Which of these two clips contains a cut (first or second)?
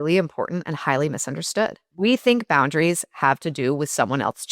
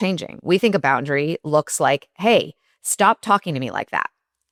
first